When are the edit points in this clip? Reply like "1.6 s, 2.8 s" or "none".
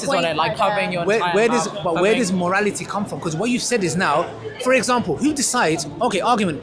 none